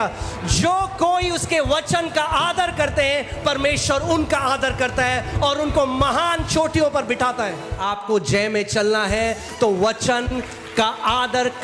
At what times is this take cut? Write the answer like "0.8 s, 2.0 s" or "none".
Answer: 8.0 s